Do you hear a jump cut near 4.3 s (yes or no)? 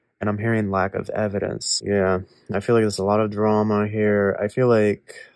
no